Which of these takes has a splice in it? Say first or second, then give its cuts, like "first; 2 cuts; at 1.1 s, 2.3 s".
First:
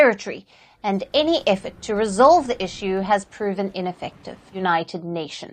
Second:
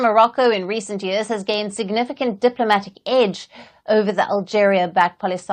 first; 1 cut; at 4.6 s